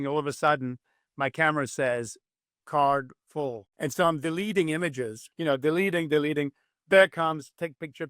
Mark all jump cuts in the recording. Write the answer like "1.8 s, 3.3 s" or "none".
3.6 s, 5.3 s

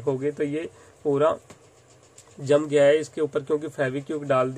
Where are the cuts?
none

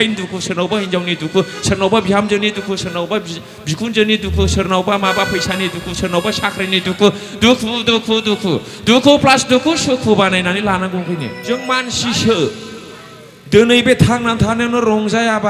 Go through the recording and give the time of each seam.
11.3 s

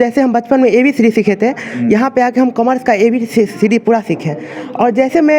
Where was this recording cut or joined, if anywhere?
none

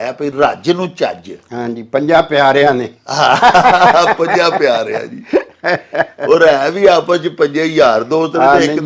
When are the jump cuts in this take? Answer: none

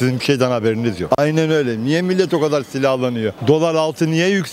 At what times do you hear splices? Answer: none

